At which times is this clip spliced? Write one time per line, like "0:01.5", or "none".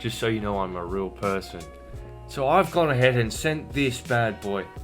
0:02.0